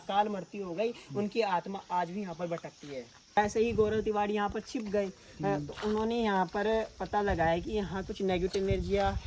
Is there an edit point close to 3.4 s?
yes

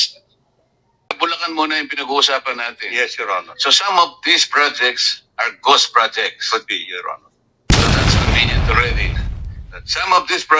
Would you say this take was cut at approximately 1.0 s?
yes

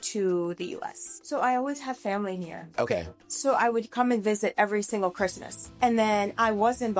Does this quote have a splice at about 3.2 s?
no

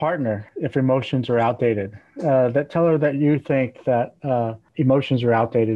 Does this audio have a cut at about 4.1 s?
no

